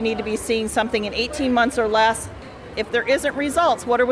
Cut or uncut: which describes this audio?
cut